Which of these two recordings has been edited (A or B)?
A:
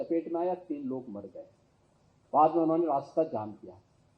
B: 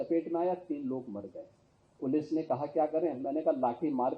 B